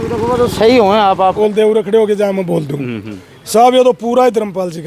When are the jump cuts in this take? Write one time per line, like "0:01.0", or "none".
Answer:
0:01.3